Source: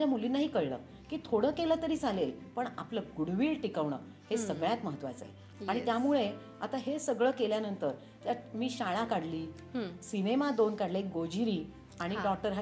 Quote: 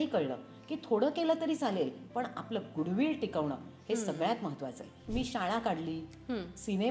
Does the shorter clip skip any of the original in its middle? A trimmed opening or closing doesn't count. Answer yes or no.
yes